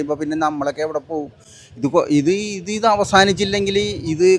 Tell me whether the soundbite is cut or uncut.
uncut